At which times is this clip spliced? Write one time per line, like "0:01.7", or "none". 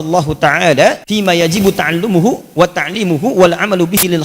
0:01.0